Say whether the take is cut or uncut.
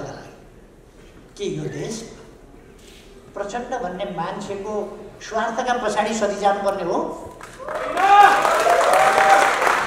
uncut